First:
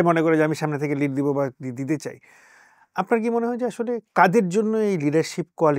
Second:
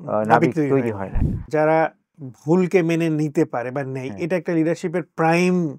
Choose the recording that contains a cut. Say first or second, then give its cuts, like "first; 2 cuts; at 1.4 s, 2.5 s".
second; 1 cut; at 1.4 s